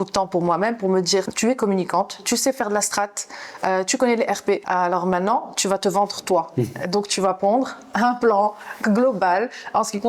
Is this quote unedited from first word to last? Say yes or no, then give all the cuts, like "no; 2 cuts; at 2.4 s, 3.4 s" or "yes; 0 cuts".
no; 2 cuts; at 1.3 s, 4.6 s